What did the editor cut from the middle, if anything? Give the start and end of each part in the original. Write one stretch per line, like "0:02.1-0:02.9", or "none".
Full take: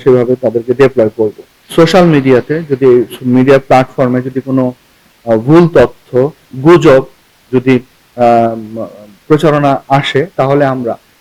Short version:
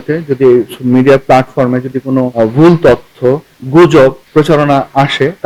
0:04.7-0:05.2
0:07.1-0:09.2